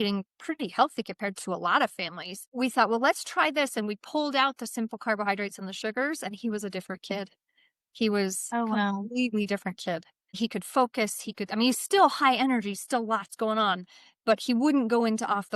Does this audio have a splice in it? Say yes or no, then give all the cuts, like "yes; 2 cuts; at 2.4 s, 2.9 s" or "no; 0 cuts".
yes; 1 cut; at 10.2 s